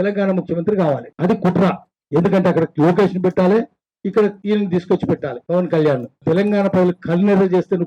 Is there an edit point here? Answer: yes; 5 cuts; at 1.1 s, 1.9 s, 4.4 s, 5.3 s, 6.2 s

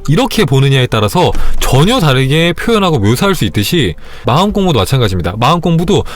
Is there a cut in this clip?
yes; 1 cut; at 4.2 s

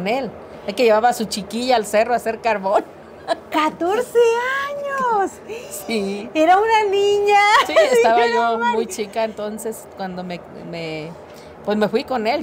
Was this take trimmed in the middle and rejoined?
no; 0 cuts

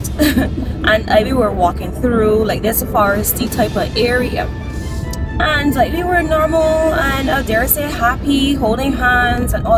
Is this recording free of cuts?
yes; 0 cuts

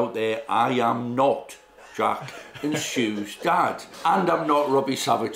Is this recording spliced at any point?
yes; 1 cut; at 3.9 s

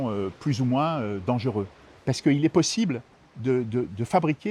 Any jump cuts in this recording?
yes; 1 cut; at 1.8 s

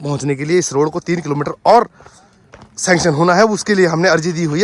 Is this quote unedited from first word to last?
yes; 0 cuts

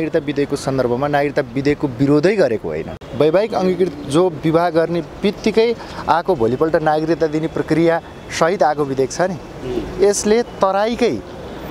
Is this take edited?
yes; 1 cut; at 3.0 s

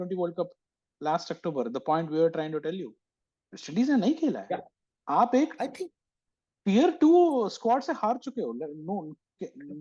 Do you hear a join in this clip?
no; 0 cuts

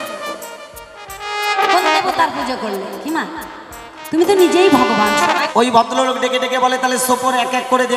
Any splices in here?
yes; 1 cut; at 5.5 s

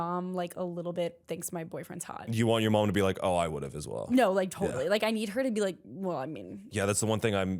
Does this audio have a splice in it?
yes; 2 cuts; at 2.2 s, 6.7 s

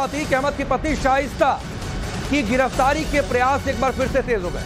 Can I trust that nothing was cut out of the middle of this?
yes; 0 cuts

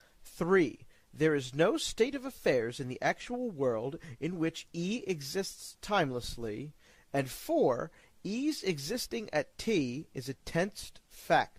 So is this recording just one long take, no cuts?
yes; 0 cuts

